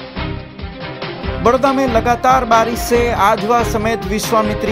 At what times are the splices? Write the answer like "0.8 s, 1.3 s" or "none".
none